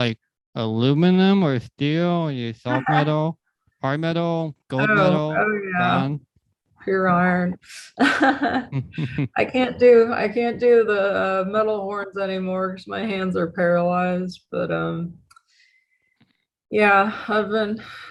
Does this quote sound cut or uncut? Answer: uncut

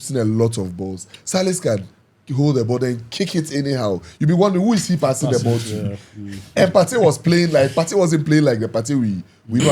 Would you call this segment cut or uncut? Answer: uncut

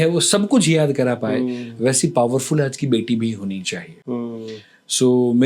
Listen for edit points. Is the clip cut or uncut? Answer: uncut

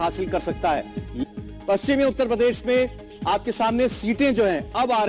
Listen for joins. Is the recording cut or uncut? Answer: cut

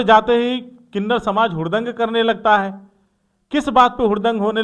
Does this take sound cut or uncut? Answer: uncut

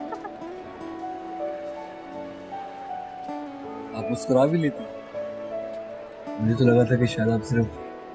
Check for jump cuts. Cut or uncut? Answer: uncut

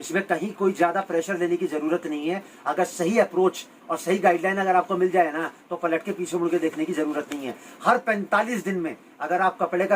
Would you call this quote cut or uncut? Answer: uncut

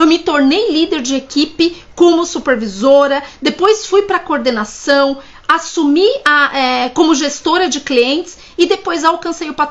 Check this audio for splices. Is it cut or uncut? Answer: uncut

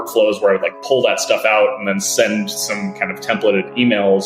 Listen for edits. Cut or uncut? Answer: uncut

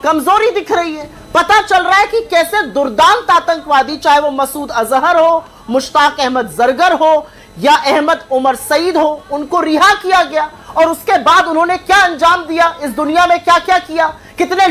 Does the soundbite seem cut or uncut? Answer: uncut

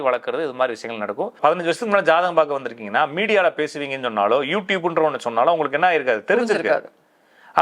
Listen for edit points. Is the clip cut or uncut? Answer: cut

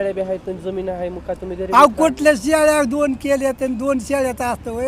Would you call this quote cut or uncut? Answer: uncut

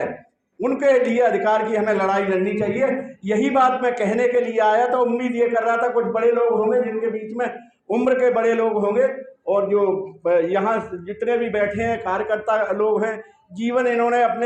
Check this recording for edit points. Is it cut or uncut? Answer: uncut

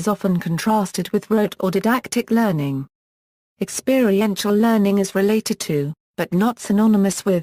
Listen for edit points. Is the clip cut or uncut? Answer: uncut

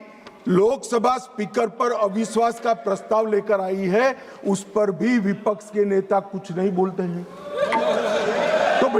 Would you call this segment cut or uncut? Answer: uncut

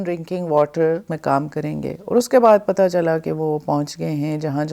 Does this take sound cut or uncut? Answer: cut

